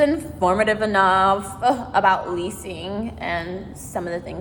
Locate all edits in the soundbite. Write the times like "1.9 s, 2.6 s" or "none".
none